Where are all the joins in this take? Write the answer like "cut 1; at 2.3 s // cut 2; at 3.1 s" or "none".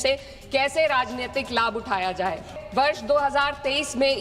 cut 1; at 2.6 s

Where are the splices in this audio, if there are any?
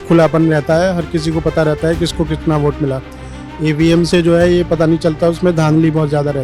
none

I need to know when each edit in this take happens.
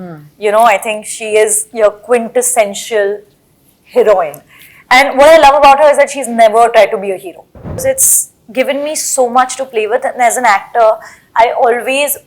cut 1; at 7.8 s

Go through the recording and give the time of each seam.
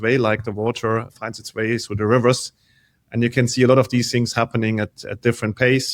none

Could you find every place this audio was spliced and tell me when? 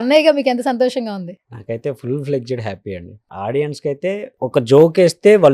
cut 1; at 3.1 s // cut 2; at 4.3 s

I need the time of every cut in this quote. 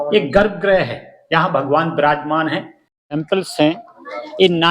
cut 1; at 2.8 s

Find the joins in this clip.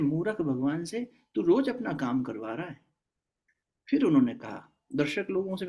none

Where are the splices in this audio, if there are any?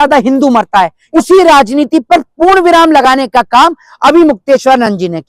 cut 1; at 1.0 s

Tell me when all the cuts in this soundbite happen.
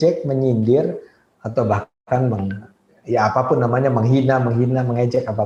none

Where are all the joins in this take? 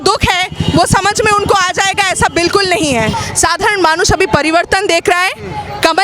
cut 1; at 3.1 s

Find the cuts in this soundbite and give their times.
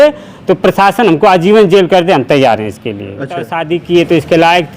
cut 1; at 3.6 s

